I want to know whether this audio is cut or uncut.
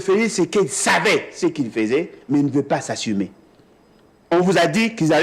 uncut